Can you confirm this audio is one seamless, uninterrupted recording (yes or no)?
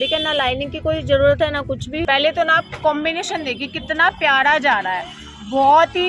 no